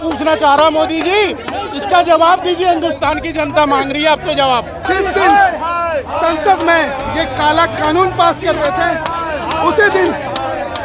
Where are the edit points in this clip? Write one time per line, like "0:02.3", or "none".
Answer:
0:04.9